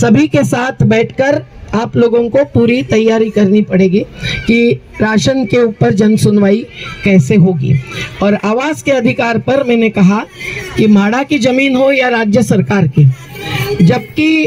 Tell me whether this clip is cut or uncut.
uncut